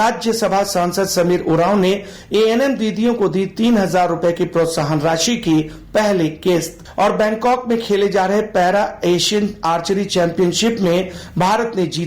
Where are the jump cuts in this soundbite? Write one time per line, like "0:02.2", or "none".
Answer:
0:06.8